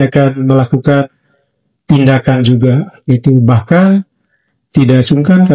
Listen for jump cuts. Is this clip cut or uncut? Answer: uncut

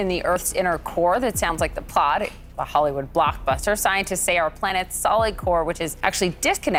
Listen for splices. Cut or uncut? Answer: uncut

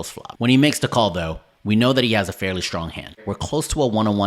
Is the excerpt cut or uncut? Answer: cut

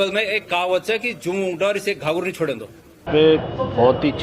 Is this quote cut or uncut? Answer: cut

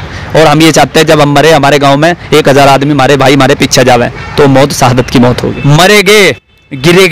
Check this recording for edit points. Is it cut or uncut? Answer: cut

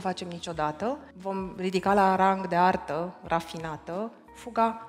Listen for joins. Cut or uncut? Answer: cut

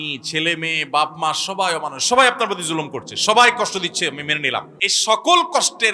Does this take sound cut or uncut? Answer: cut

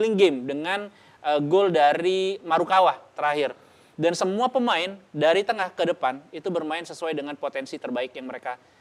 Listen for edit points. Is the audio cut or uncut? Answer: uncut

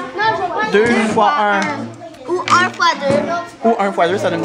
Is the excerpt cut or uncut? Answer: uncut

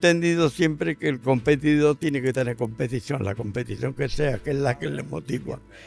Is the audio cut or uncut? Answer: uncut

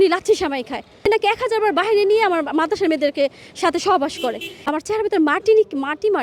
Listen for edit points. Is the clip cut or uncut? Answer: cut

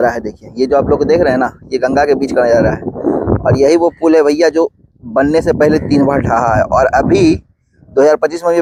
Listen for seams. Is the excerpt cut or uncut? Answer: uncut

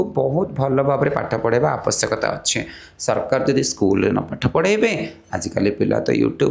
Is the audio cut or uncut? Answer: uncut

